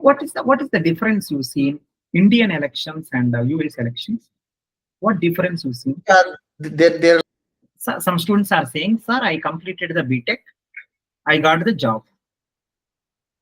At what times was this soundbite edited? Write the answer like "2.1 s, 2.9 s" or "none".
7.2 s